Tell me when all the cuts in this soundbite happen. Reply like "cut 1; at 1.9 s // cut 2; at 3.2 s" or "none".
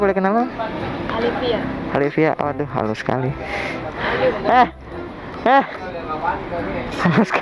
none